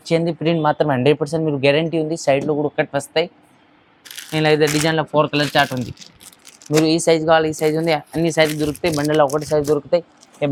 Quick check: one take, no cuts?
yes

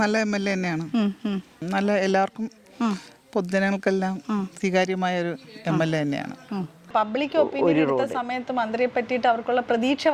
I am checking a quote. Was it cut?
yes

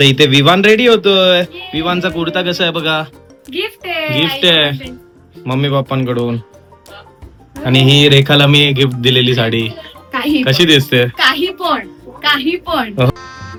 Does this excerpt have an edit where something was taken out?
no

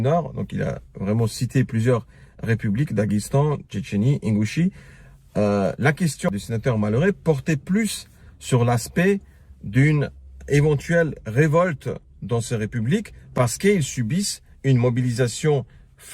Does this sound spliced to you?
yes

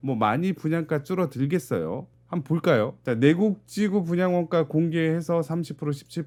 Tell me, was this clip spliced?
no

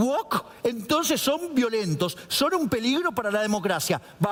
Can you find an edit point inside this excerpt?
no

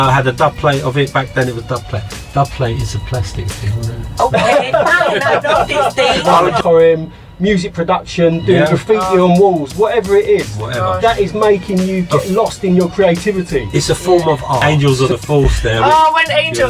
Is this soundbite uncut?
no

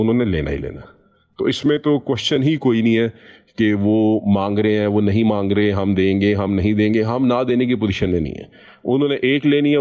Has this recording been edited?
no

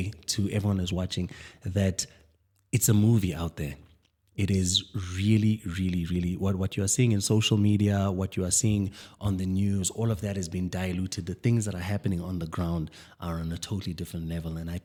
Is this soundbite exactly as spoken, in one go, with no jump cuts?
yes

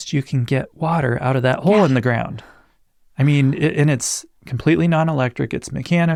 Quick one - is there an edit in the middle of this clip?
no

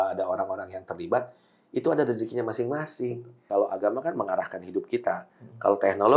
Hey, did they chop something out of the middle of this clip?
yes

